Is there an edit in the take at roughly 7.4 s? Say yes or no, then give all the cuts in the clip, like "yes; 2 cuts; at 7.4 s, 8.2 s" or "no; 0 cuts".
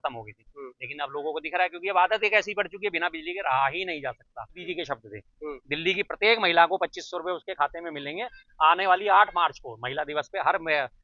no; 1 cut; at 4.6 s